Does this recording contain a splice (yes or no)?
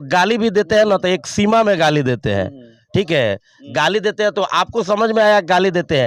no